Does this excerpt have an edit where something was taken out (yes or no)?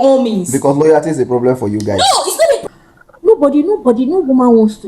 yes